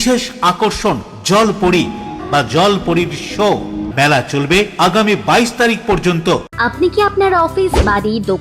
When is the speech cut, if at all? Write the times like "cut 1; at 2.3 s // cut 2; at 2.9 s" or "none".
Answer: cut 1; at 2.2 s // cut 2; at 3.9 s // cut 3; at 6.5 s